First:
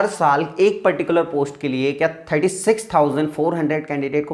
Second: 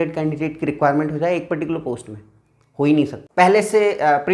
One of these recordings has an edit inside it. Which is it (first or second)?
second